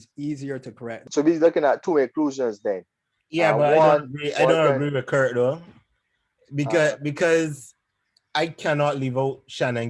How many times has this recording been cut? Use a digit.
1